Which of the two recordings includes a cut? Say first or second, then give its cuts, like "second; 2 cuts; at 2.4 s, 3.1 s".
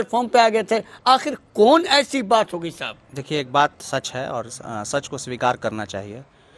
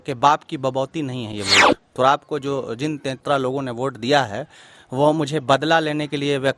second; 1 cut; at 3.2 s